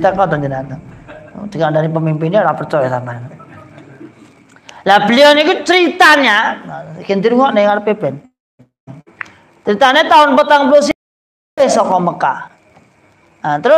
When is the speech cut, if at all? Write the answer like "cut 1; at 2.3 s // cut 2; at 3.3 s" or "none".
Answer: none